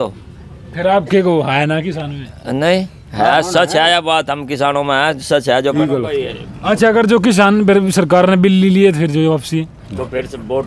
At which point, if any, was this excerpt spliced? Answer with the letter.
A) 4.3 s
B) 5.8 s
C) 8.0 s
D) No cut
B